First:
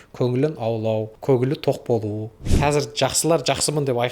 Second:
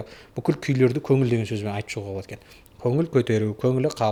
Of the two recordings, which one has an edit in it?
first; 2 cuts; at 1.1 s, 2.4 s

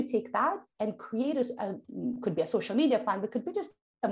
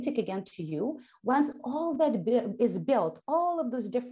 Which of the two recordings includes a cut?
first; 1 cut; at 1.9 s

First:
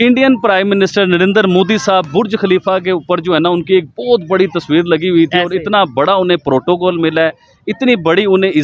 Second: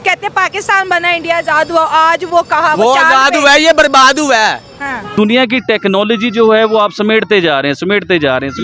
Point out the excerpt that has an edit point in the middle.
second; 1 cut; at 5.1 s

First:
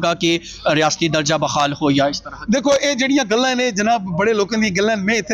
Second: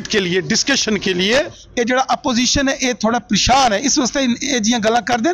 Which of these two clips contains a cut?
second; 1 cut; at 1.6 s

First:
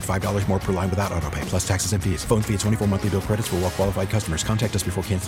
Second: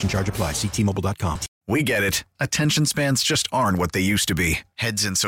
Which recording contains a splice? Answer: second; 1 cut; at 1.5 s

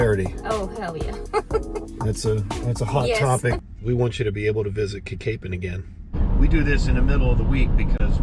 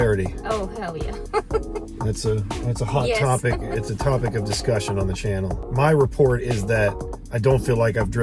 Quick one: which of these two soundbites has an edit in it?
first; 2 cuts; at 3.6 s, 6.2 s

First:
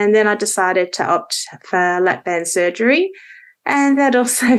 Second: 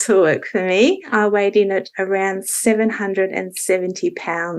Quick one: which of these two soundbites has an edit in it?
second; 1 cut; at 1.1 s

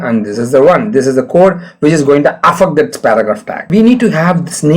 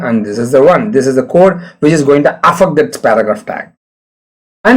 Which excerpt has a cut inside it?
first; 1 cut; at 3.7 s

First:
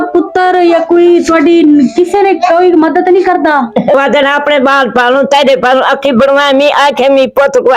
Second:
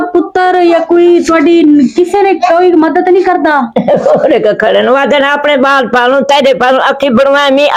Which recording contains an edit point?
first; 1 cut; at 4.0 s

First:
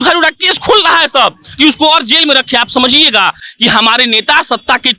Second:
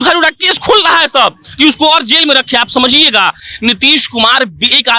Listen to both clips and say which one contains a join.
first; 1 cut; at 3.5 s

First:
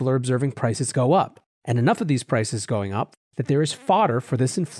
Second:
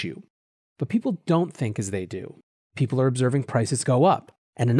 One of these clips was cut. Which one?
first; 1 cut; at 3.1 s

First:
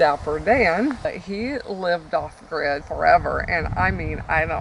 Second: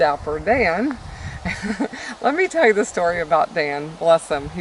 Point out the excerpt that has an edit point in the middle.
first; 2 cuts; at 1.1 s, 2.8 s

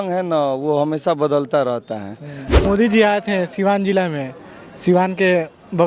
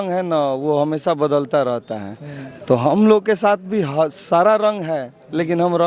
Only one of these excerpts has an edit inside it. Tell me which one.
first; 1 cut; at 2.6 s

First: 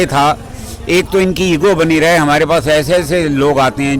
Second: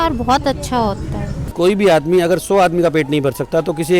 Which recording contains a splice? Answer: second; 1 cut; at 1.4 s

